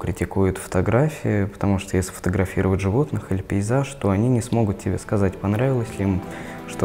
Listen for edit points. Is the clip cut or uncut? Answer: uncut